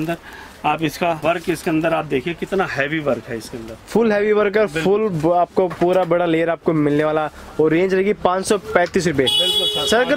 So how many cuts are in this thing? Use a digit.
0